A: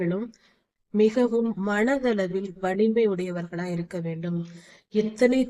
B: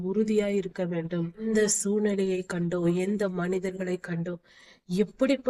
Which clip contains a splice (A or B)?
B